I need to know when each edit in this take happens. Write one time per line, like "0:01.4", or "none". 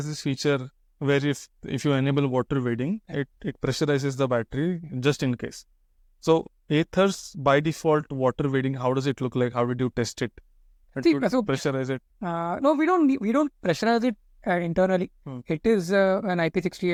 none